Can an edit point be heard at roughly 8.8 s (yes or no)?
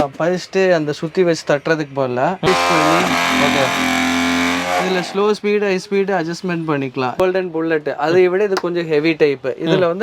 no